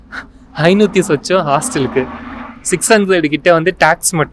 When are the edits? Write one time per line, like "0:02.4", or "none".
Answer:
none